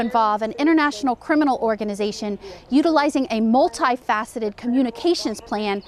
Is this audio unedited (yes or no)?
yes